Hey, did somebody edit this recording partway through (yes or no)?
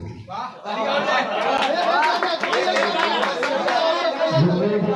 no